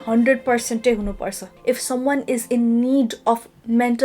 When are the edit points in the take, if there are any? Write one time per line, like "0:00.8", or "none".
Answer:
0:01.5